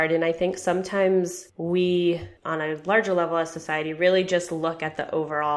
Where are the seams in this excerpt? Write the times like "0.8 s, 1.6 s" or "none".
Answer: none